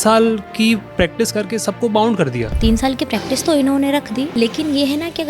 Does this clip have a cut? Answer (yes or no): yes